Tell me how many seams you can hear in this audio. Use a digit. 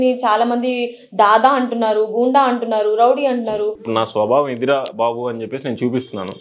1